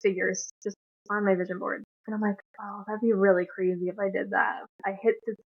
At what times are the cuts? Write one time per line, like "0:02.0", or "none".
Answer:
0:01.9
0:04.7